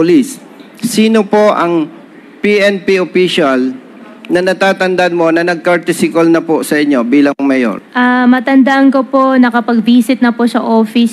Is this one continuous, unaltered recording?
no; 1 cut; at 7.8 s

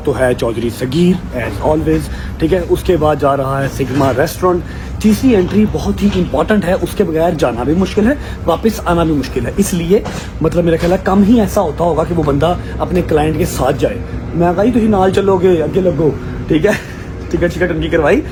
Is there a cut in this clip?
no; 0 cuts

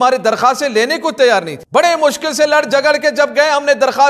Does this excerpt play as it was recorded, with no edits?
yes; 0 cuts

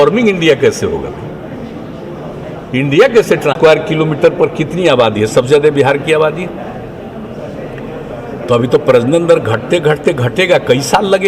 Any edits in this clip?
yes; 1 cut; at 3.5 s

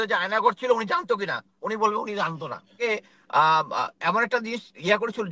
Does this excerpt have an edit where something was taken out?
yes; 1 cut; at 2.8 s

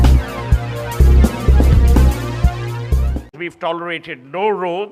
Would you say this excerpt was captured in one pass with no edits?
yes; 0 cuts

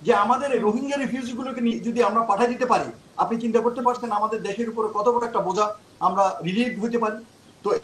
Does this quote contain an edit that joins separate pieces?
no; 0 cuts

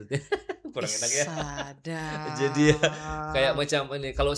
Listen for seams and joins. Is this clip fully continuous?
yes; 0 cuts

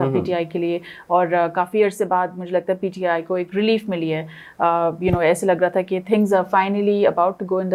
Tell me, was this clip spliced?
no; 0 cuts

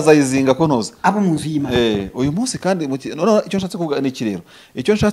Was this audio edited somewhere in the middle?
no; 0 cuts

